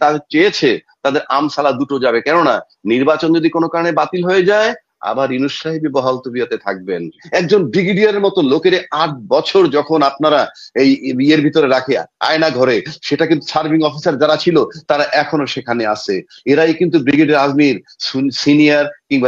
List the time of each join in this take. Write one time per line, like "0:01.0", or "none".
0:07.2